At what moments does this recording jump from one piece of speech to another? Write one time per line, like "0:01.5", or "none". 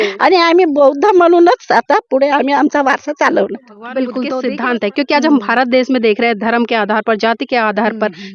0:03.9